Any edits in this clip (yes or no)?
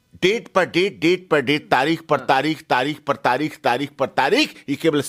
no